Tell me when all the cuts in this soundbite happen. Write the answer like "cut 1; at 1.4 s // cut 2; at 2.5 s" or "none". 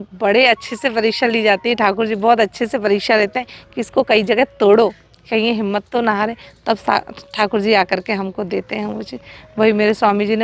none